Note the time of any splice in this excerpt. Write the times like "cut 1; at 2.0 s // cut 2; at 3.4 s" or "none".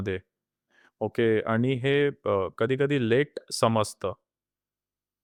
none